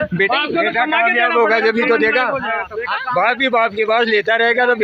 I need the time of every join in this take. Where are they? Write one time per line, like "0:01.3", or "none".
none